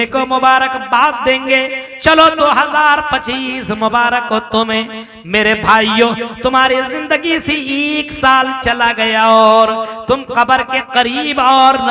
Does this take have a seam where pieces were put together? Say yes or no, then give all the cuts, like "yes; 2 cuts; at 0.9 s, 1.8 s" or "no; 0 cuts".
no; 0 cuts